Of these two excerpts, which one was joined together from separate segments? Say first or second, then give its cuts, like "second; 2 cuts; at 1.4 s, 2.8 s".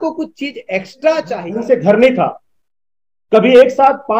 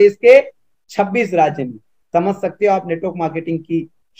first; 1 cut; at 1.4 s